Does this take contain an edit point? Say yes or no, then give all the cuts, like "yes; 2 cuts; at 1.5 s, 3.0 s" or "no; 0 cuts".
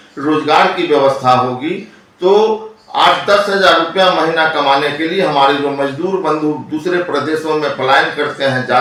no; 0 cuts